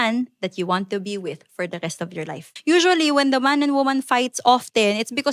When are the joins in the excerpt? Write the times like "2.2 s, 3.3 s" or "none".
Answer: 2.5 s